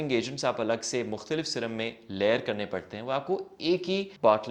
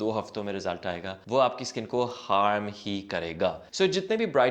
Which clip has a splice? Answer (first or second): second